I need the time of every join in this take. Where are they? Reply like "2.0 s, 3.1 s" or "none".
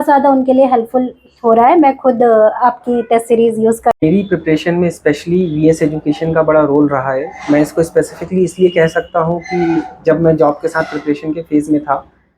4.0 s